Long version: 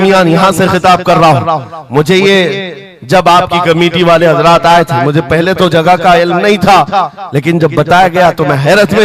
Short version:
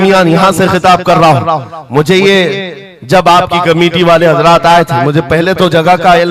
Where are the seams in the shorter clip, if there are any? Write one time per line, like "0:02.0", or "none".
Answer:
none